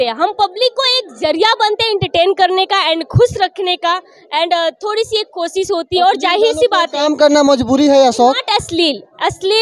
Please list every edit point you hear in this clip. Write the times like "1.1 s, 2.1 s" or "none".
none